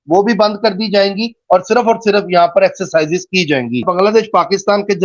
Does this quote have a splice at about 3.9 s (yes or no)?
yes